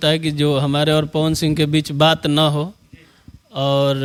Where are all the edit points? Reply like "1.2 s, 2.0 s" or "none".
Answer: none